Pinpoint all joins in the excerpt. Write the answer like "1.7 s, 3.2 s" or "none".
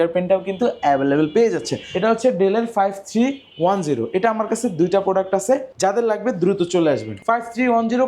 1.9 s, 5.7 s, 7.2 s